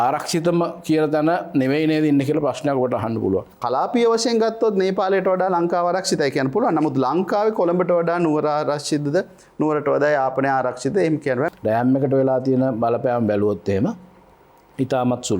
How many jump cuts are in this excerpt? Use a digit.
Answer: 2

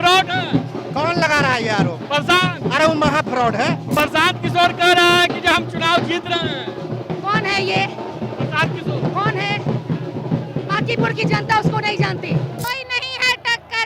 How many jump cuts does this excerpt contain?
2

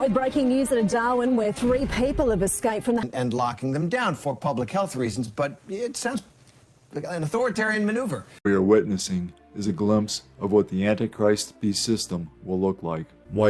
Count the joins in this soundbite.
2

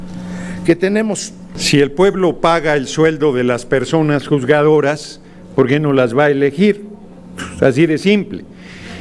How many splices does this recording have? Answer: 1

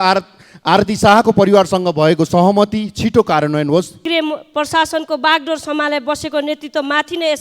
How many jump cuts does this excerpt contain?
1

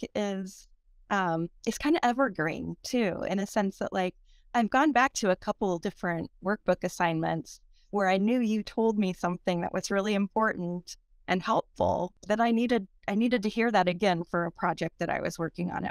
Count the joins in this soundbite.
1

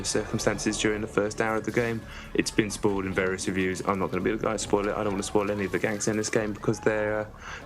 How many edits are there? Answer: 1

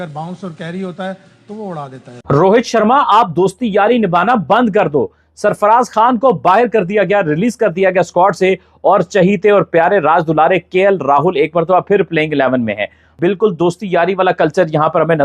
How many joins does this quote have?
2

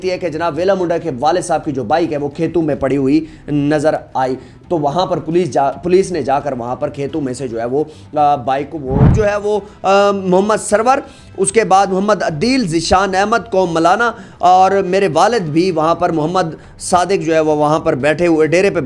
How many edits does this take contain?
1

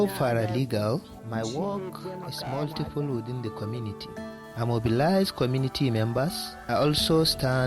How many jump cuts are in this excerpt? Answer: 3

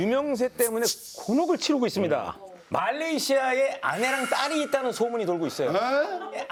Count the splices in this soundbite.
0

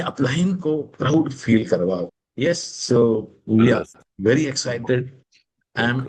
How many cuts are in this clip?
1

